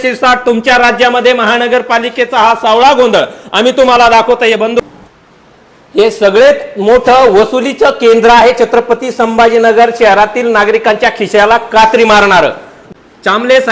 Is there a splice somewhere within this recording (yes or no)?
yes